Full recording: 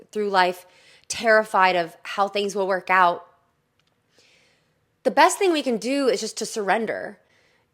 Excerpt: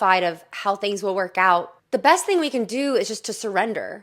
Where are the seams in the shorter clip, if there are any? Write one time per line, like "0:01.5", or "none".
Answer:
0:01.8

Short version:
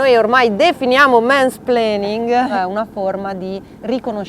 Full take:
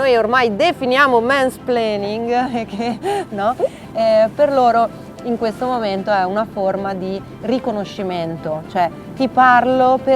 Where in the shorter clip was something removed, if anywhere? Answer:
0:02.5

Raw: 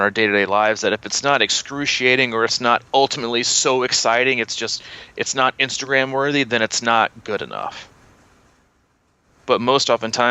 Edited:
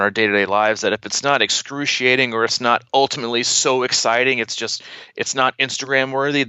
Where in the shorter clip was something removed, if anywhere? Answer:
none

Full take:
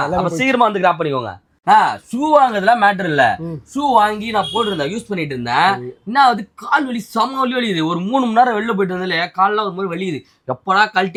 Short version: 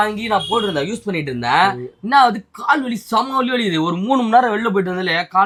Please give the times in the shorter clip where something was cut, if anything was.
none

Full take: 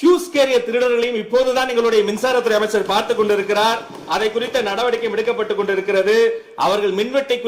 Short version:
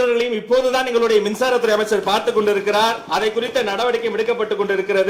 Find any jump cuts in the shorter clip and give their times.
0:03.0

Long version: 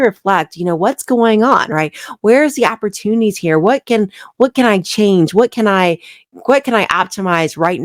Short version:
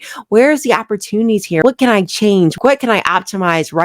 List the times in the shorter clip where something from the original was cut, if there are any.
0:01.6
0:02.5

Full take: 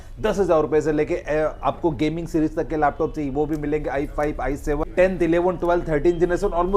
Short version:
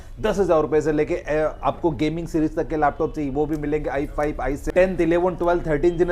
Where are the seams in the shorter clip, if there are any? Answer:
0:04.7

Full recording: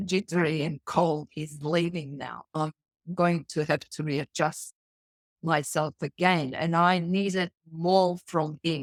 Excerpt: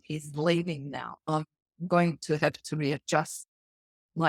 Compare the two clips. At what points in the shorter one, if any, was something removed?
none

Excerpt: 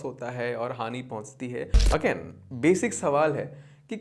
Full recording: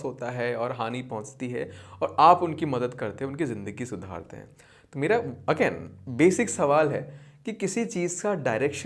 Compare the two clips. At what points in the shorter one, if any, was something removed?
0:01.8

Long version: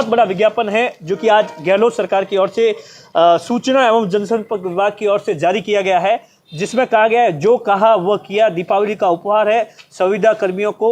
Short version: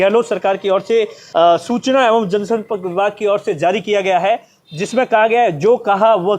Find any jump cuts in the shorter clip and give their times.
0:01.2

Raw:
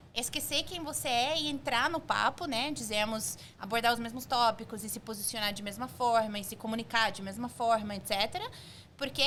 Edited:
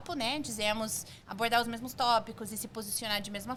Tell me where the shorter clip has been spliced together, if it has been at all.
none

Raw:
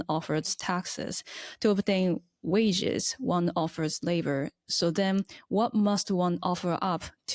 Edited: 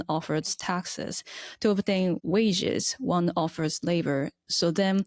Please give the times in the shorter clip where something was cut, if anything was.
0:02.2

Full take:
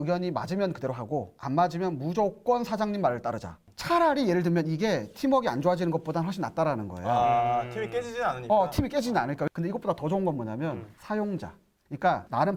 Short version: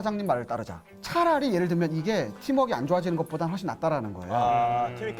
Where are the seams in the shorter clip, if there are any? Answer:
none

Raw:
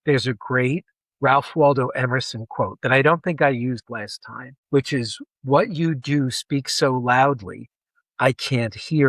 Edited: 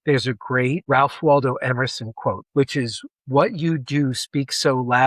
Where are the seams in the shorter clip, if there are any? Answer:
0:00.8
0:02.4

